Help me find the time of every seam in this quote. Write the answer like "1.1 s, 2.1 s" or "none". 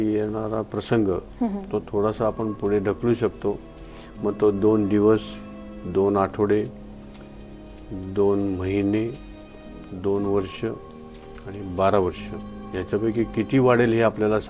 none